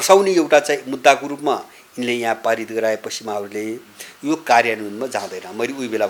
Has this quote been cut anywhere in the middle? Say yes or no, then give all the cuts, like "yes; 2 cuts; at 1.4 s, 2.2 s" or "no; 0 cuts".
no; 0 cuts